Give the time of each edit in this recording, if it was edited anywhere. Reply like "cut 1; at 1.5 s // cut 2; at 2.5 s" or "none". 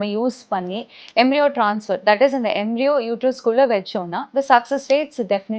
none